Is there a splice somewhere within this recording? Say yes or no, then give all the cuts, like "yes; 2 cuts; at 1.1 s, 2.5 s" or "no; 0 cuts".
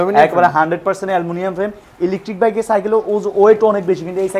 no; 0 cuts